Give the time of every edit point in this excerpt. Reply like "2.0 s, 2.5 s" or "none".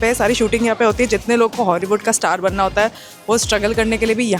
none